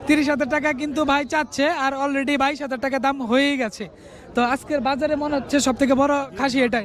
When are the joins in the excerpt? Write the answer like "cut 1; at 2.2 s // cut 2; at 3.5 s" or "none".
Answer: none

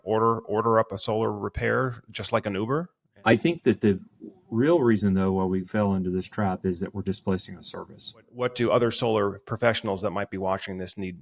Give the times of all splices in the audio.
cut 1; at 3.0 s // cut 2; at 8.4 s

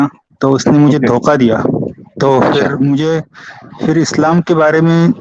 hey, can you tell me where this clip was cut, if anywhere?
none

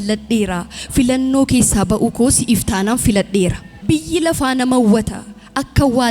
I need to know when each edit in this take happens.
cut 1; at 3.7 s

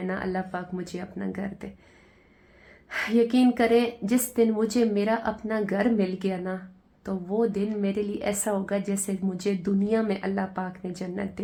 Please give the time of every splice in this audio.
none

